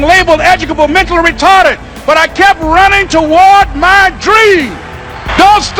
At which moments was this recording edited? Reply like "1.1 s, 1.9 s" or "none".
none